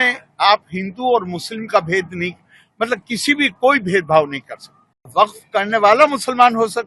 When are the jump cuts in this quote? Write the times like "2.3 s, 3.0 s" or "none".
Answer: 5.0 s